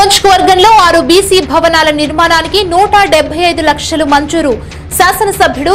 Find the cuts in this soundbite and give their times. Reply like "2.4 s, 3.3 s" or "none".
none